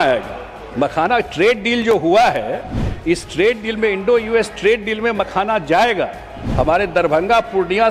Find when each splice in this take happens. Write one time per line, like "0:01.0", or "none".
none